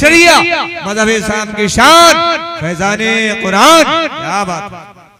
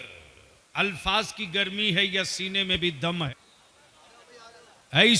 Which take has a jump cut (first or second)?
second